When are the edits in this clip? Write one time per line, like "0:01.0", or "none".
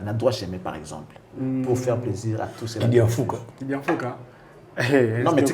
none